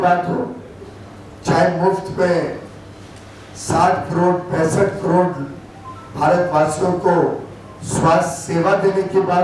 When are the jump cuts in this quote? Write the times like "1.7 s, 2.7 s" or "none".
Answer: none